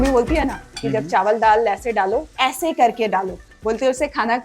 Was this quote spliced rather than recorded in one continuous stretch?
yes; 2 cuts; at 2.3 s, 3.5 s

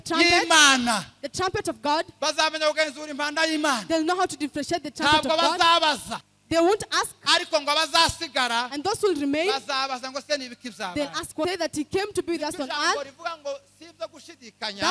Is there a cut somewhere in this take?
yes; 1 cut; at 11.4 s

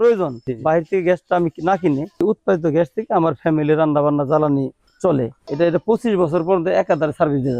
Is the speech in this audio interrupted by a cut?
yes; 2 cuts; at 2.2 s, 5.1 s

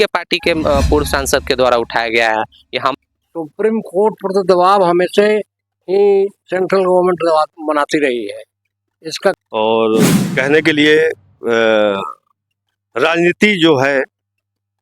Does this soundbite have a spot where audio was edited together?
yes; 2 cuts; at 2.9 s, 9.4 s

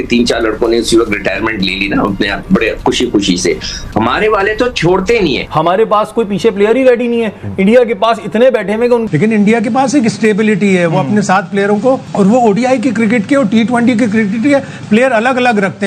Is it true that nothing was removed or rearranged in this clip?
no; 2 cuts; at 5.5 s, 9.0 s

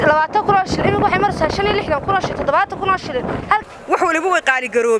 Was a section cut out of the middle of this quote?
yes; 1 cut; at 3.6 s

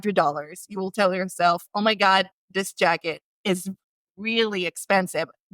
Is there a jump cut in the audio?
yes; 1 cut; at 3.3 s

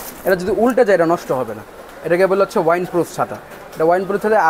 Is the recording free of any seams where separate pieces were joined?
yes; 0 cuts

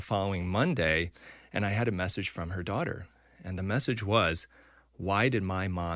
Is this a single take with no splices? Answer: yes; 0 cuts

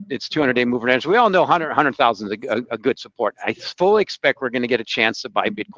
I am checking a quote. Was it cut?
no; 0 cuts

